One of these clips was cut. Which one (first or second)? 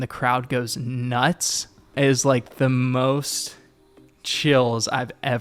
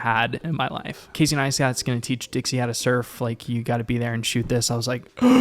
second